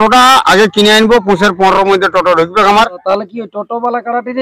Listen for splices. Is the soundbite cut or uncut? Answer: cut